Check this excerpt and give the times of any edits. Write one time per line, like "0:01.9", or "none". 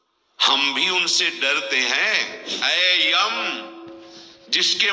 0:02.5